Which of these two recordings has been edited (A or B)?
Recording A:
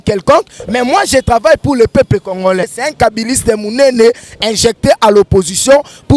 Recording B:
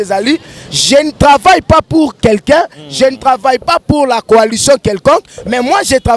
A